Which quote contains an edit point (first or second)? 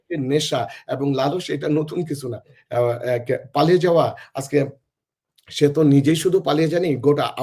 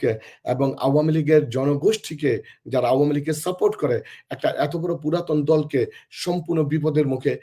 first